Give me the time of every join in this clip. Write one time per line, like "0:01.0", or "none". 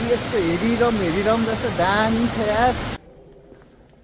0:03.0